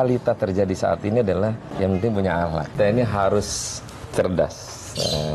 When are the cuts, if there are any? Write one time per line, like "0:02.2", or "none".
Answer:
0:01.7
0:02.7